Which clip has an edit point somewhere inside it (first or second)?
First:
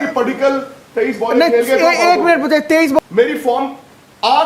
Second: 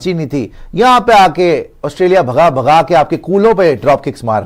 first